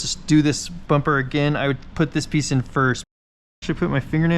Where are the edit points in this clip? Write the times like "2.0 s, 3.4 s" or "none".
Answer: 3.2 s

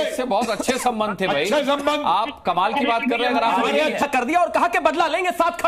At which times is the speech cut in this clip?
4.0 s

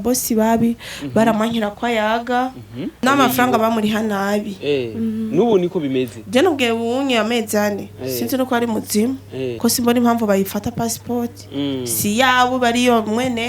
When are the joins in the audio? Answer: 3.0 s, 9.5 s

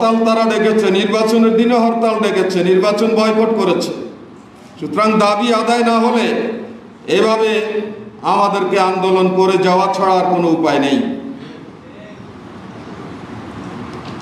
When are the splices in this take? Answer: none

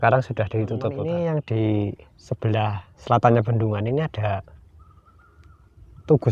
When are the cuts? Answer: 1.0 s

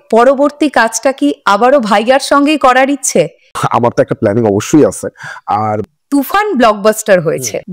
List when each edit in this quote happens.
3.6 s, 5.8 s

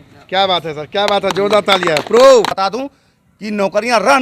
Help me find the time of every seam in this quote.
2.5 s

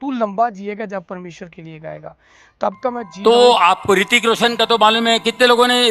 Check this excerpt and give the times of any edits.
3.1 s

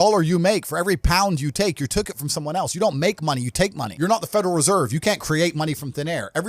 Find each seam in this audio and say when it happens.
3.8 s

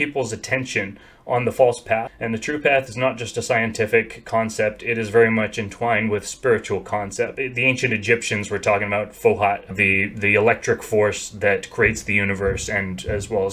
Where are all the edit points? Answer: 2.1 s, 7.3 s, 9.7 s

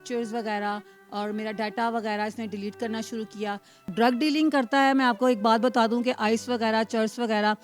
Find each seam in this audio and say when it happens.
3.9 s

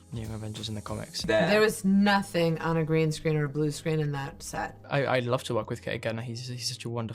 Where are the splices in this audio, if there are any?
1.2 s, 4.8 s

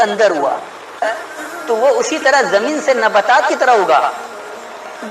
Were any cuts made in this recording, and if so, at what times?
1.0 s

